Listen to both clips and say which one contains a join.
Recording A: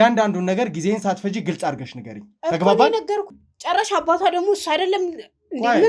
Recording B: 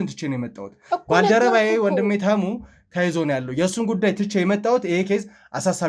A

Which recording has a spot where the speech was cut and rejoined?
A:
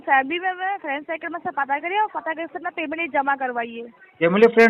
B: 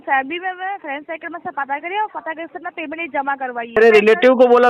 B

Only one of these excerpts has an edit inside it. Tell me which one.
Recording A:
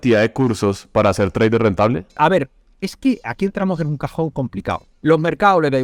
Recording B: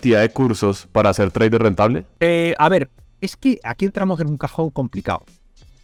A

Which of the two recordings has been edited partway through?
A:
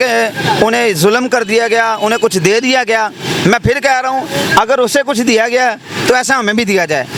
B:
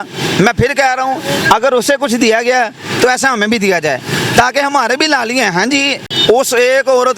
B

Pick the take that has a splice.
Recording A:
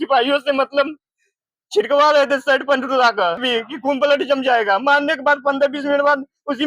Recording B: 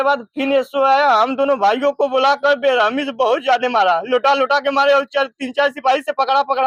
A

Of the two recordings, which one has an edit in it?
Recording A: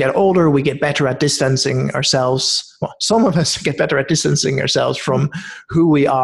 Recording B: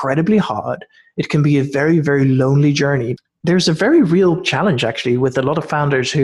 B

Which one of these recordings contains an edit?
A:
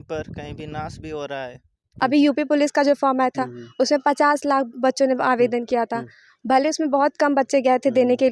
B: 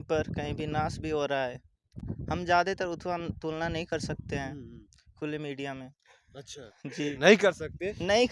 A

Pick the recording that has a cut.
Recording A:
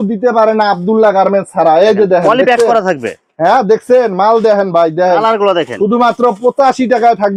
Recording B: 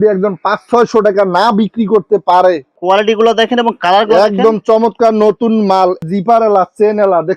B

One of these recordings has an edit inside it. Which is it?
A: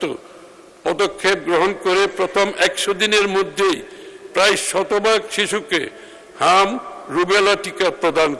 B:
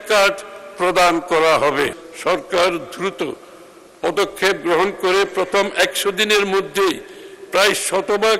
B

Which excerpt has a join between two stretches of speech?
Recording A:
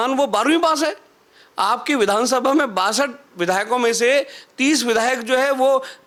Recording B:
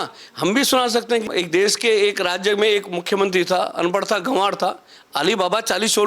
B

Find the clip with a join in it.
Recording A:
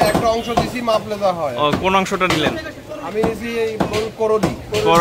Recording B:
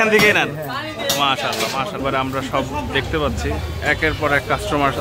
B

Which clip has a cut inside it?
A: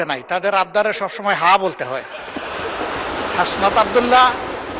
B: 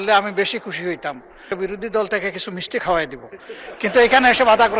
B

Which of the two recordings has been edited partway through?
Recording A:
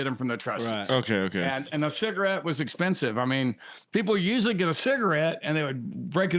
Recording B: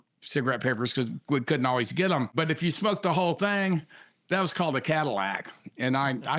B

